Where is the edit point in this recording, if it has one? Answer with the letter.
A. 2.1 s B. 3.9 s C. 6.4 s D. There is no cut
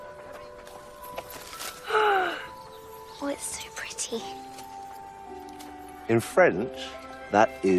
D